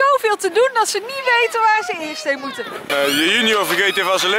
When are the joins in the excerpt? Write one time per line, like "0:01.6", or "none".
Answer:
0:02.8